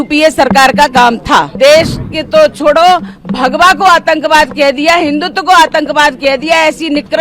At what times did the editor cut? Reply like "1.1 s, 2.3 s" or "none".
1.5 s